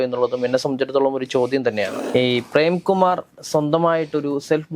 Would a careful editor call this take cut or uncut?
cut